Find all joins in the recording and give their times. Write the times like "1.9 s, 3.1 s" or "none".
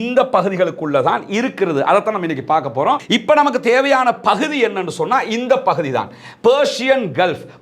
3.0 s